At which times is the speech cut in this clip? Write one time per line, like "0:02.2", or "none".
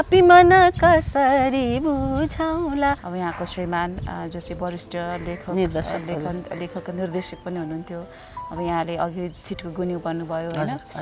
0:03.0